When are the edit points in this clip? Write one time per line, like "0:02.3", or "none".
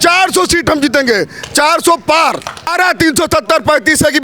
0:02.7